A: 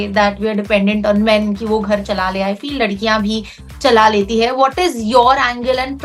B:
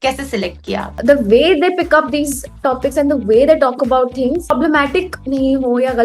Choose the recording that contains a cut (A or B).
B